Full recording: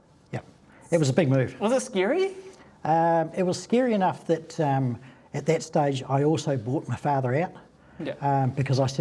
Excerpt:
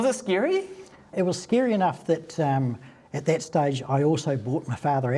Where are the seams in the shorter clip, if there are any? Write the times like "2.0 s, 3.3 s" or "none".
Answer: 1.1 s